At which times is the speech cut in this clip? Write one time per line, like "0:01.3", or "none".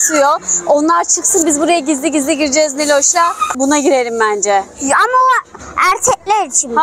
0:03.5